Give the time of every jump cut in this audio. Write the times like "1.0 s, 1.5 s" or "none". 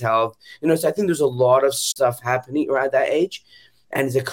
1.8 s